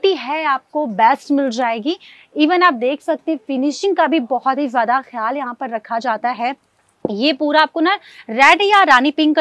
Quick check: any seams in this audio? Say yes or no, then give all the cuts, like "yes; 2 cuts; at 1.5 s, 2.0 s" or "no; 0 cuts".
yes; 1 cut; at 6.6 s